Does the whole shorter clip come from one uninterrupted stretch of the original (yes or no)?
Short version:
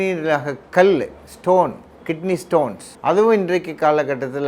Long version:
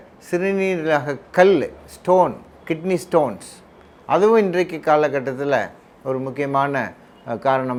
no